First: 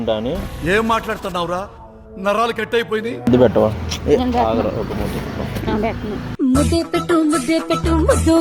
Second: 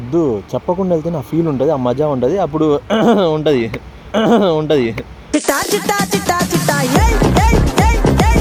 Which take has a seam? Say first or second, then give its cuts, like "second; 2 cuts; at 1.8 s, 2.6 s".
first; 1 cut; at 3.3 s